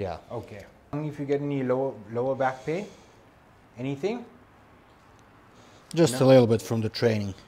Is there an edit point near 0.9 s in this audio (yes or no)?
yes